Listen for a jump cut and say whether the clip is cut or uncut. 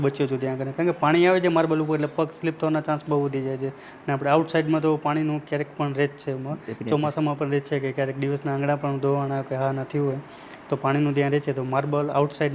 uncut